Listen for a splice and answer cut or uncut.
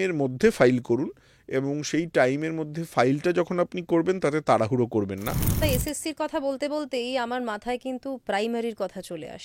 cut